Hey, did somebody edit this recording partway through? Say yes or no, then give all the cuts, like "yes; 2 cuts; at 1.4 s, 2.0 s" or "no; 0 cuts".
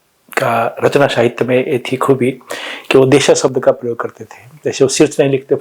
no; 0 cuts